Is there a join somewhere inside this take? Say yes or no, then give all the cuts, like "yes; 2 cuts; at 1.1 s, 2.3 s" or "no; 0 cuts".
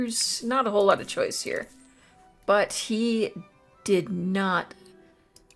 no; 0 cuts